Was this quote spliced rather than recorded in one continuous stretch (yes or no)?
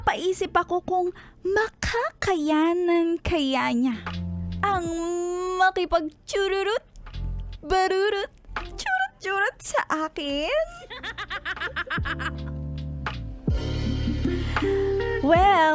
no